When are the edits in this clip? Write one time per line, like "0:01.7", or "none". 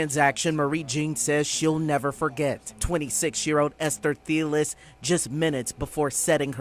none